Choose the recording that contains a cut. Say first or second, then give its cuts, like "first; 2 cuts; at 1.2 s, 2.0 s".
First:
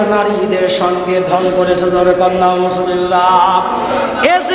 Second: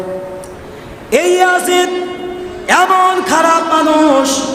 first; 1 cut; at 1.4 s